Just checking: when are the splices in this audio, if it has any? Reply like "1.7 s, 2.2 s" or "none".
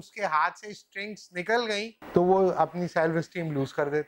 2.0 s